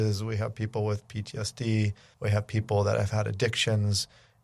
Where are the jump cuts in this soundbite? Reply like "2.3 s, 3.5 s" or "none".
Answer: 2.0 s

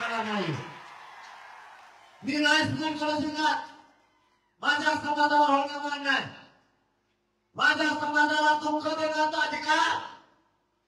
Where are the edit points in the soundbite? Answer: none

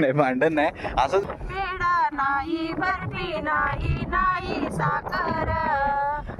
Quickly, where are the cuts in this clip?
1.2 s

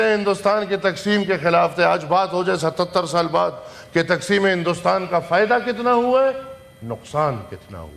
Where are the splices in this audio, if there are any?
none

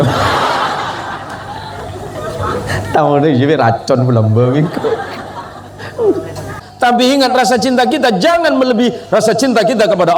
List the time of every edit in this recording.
6.6 s

